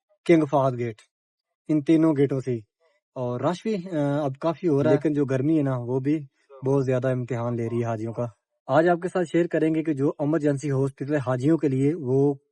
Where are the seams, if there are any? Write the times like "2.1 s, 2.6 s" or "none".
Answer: 4.9 s